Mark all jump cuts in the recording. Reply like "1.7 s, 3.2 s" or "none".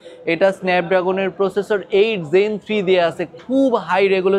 none